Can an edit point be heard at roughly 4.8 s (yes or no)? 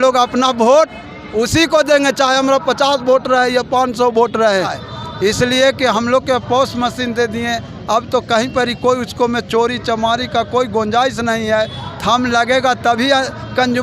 yes